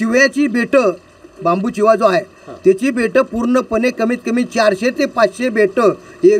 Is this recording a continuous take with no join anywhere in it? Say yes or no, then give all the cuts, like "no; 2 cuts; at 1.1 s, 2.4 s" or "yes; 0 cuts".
yes; 0 cuts